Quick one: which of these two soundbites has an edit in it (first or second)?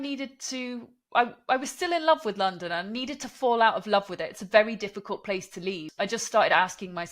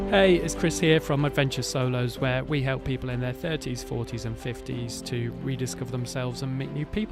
first